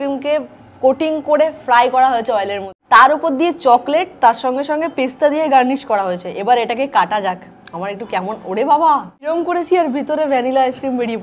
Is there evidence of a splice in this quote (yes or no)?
no